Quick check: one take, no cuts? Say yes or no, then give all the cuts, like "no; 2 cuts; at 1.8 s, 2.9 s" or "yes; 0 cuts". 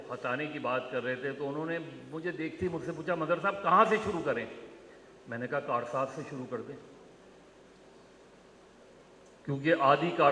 yes; 0 cuts